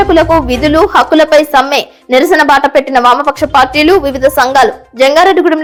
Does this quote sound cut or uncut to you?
uncut